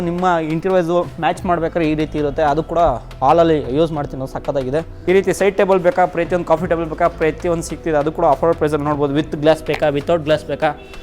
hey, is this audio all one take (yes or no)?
no